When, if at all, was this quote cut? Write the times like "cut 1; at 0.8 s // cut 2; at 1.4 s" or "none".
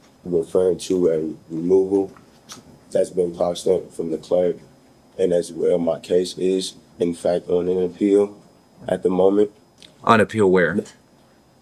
none

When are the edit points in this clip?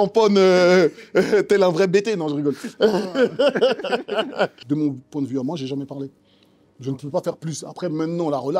cut 1; at 4.6 s

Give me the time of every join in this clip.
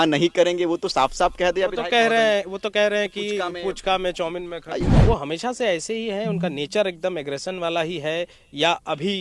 cut 1; at 4.9 s

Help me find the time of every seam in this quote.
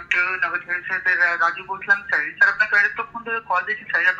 none

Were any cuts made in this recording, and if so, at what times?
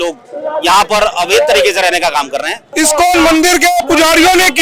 cut 1; at 2.6 s

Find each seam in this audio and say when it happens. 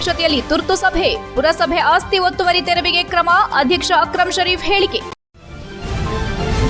cut 1; at 5.1 s

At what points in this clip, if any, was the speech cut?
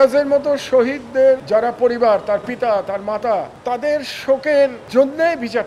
cut 1; at 1.4 s // cut 2; at 3.5 s // cut 3; at 4.8 s

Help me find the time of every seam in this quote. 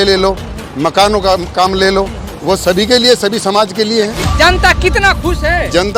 cut 1; at 4.2 s

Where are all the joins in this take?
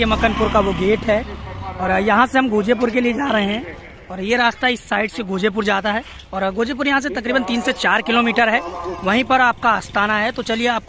none

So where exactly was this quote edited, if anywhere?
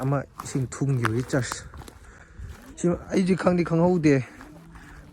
none

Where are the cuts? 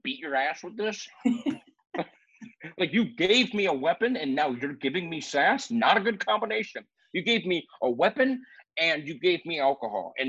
none

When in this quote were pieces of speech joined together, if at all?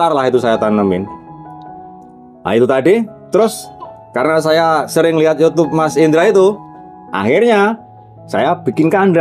none

